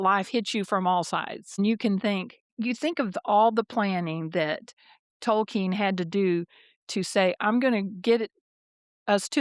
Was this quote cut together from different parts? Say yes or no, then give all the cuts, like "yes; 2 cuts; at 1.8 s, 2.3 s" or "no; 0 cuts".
no; 0 cuts